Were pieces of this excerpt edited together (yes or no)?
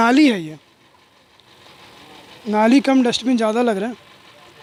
no